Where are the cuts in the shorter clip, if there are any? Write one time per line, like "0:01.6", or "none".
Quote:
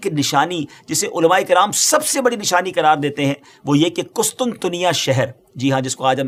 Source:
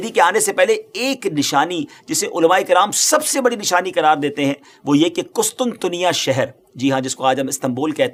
none